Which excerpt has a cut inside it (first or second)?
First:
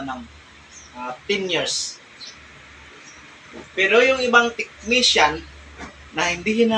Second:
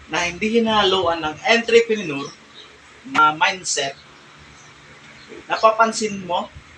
second